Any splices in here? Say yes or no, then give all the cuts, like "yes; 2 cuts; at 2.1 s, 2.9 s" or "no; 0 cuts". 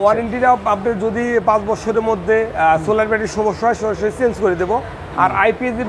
no; 0 cuts